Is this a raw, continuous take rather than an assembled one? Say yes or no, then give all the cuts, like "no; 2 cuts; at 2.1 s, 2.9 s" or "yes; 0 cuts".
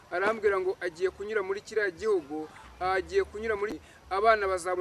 no; 1 cut; at 3.8 s